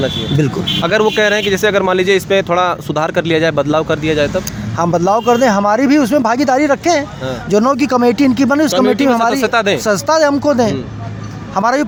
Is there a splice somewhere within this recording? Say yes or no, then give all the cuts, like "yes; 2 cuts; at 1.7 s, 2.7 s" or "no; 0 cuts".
no; 0 cuts